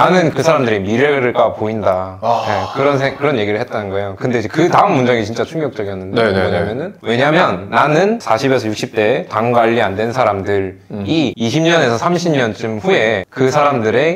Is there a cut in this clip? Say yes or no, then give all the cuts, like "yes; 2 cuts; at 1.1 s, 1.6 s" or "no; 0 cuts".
no; 0 cuts